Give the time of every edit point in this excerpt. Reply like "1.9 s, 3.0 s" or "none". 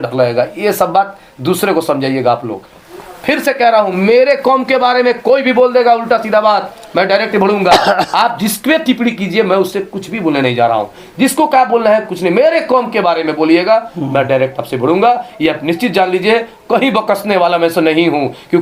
none